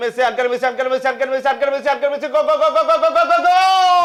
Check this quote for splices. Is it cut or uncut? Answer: uncut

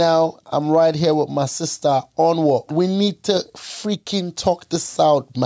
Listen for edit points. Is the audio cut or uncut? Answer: uncut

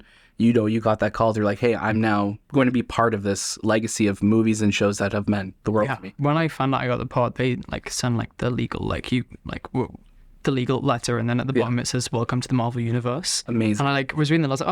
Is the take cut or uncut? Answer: cut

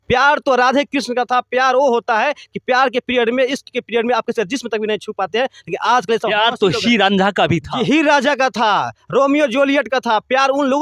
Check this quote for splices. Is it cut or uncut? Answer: uncut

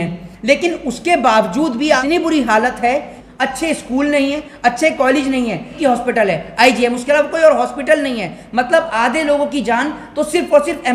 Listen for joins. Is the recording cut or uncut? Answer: cut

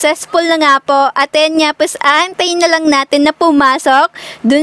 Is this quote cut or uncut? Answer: uncut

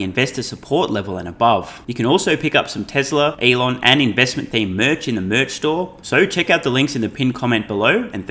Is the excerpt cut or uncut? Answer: cut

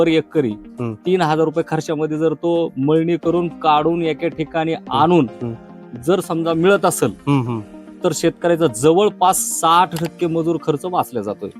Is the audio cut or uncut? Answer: uncut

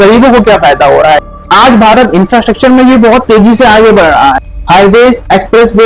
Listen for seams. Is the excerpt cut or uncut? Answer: cut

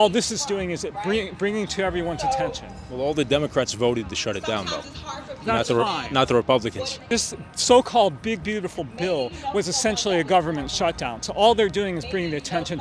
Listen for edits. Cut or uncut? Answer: cut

